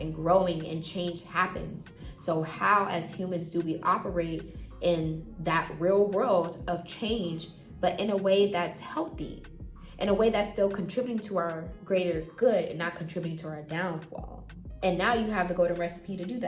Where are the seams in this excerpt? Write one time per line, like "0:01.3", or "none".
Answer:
none